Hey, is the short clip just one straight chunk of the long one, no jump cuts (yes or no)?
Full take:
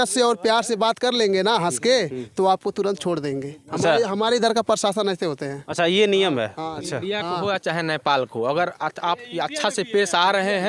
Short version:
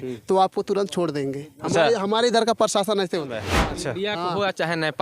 no